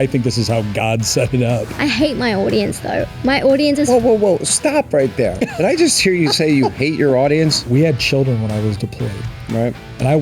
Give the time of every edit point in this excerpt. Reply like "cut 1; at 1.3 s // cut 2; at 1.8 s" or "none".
cut 1; at 1.7 s // cut 2; at 7.6 s